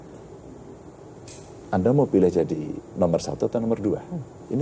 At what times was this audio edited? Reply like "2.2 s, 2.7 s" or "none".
none